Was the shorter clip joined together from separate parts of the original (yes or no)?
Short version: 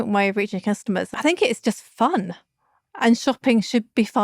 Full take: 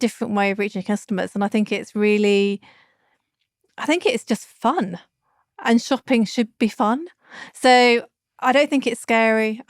yes